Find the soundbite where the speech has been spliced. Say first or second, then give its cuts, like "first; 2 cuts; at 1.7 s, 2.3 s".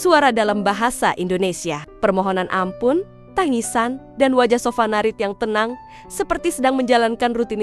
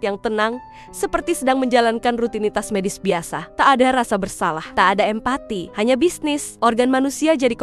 second; 4 cuts; at 3.4 s, 4.6 s, 5.6 s, 6.5 s